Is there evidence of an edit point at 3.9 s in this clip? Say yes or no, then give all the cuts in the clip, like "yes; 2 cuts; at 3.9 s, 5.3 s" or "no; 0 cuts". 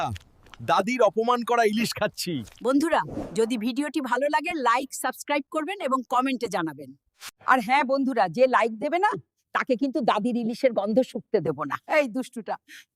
no; 1 cut; at 11.7 s